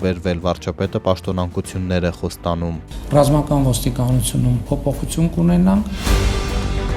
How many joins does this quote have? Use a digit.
1